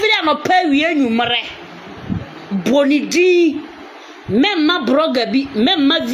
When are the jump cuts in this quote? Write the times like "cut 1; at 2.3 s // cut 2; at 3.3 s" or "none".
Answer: none